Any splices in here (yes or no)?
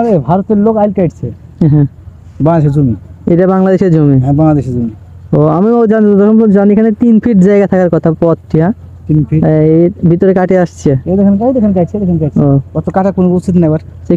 no